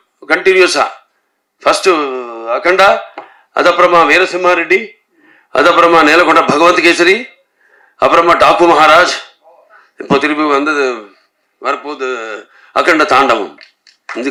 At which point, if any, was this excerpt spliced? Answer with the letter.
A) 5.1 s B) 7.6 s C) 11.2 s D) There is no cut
D